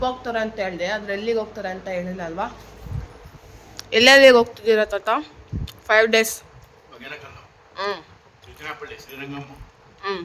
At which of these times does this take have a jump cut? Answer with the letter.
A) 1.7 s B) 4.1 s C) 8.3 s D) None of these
D